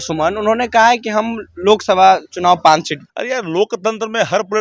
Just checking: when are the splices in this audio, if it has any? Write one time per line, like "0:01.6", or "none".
0:03.0